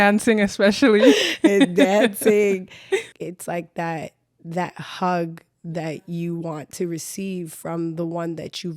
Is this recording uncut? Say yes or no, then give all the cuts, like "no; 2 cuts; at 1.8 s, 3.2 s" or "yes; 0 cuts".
no; 1 cut; at 3.1 s